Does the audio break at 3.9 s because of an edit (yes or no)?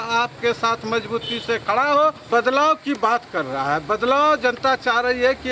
no